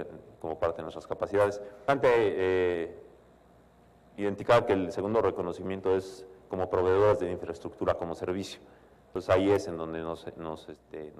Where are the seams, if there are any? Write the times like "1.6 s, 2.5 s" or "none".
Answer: none

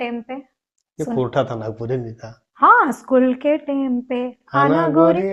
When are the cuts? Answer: none

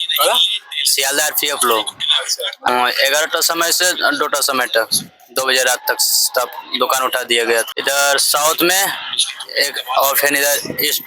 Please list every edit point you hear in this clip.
2.7 s, 7.7 s

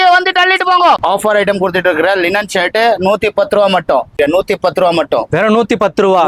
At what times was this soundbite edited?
1.0 s, 4.2 s

